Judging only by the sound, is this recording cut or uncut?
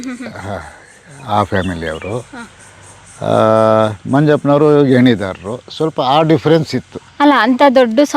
uncut